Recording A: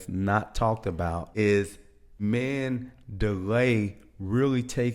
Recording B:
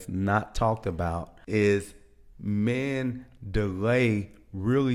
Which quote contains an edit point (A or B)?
A